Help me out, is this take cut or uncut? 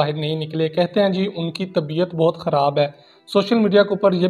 uncut